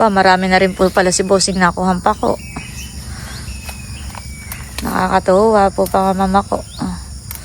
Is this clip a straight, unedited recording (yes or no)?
yes